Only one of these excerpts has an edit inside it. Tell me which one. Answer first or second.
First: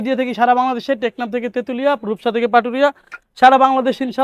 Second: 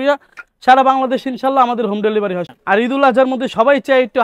second